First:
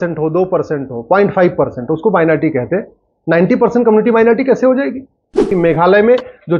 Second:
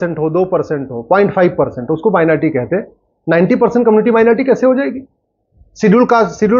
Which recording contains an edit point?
first; 1 cut; at 5.5 s

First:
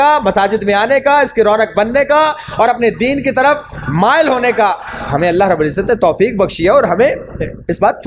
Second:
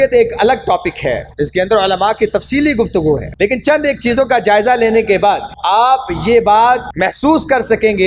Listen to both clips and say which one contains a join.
second; 4 cuts; at 1.3 s, 3.3 s, 5.5 s, 6.9 s

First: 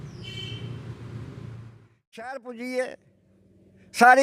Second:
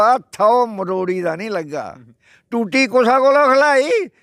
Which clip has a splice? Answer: first; 1 cut; at 1.7 s

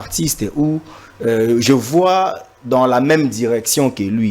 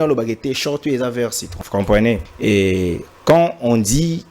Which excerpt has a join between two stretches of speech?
second; 2 cuts; at 1.5 s, 2.3 s

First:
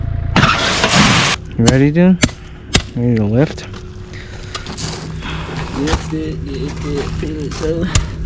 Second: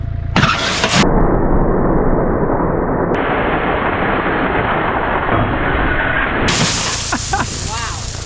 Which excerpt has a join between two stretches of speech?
first; 1 cut; at 1.0 s

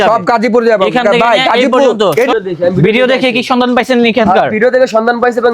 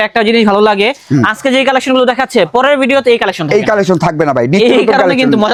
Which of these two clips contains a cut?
first; 1 cut; at 2.3 s

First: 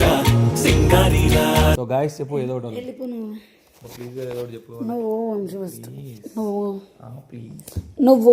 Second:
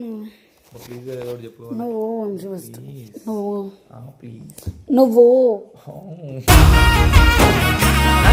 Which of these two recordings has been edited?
first; 1 cut; at 1.8 s

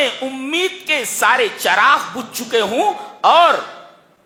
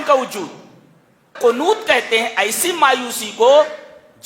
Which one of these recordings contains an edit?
second; 1 cut; at 1.3 s

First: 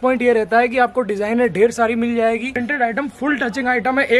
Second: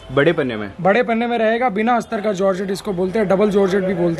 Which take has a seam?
first; 1 cut; at 2.5 s

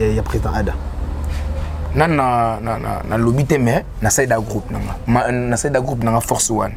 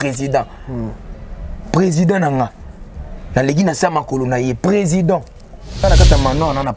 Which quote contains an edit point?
second; 1 cut; at 5.8 s

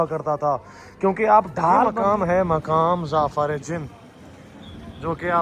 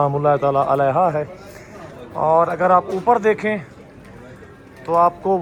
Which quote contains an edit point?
first; 1 cut; at 2.0 s

